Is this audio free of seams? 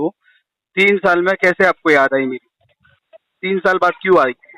yes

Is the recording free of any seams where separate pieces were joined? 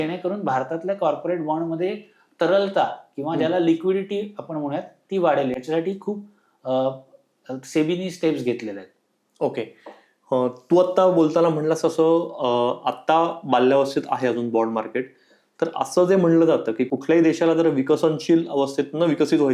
yes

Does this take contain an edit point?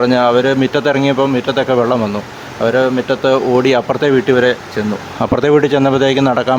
no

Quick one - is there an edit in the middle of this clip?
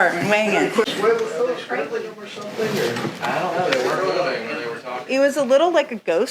yes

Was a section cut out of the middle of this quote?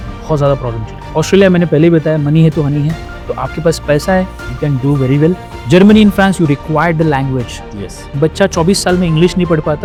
no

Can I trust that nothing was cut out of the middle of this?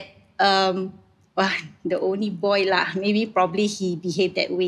yes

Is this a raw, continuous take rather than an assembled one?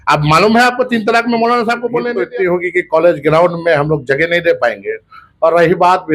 no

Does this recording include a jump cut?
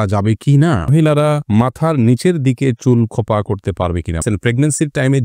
yes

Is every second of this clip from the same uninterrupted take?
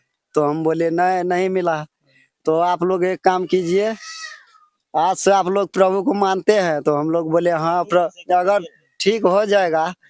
yes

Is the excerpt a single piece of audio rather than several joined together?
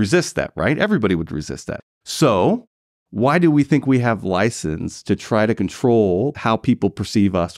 no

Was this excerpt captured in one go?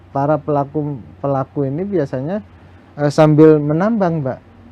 yes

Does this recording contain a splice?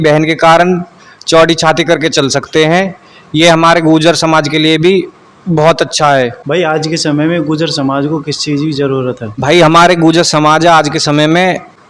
no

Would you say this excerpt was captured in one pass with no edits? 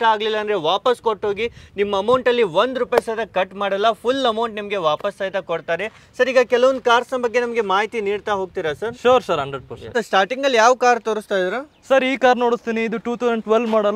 yes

